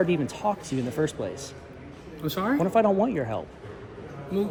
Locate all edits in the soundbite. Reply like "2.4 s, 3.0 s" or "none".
none